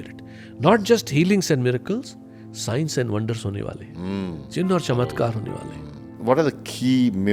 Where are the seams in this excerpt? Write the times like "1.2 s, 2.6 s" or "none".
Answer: 6.1 s